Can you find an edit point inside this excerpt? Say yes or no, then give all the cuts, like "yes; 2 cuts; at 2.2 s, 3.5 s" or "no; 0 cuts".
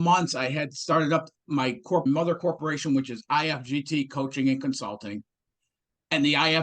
yes; 1 cut; at 2.0 s